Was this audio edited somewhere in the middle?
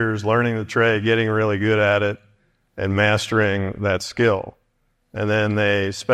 no; 0 cuts

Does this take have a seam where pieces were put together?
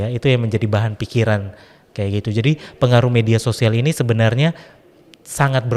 no; 0 cuts

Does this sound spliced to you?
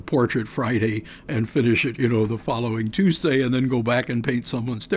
yes; 1 cut; at 1.2 s

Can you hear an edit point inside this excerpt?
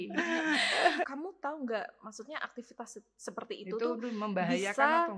yes; 1 cut; at 1.1 s

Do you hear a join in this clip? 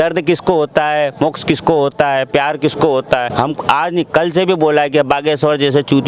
yes; 1 cut; at 3.3 s

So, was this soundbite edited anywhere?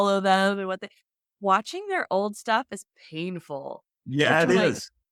no; 0 cuts

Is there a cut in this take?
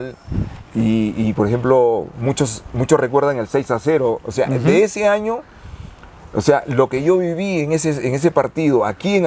no; 0 cuts

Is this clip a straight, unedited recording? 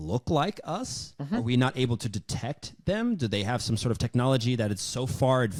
yes; 0 cuts

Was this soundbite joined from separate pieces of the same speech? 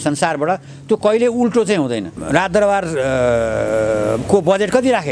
yes; 1 cut; at 2.2 s

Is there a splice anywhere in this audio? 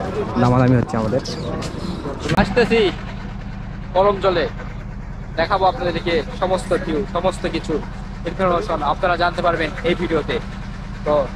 yes; 1 cut; at 2.3 s

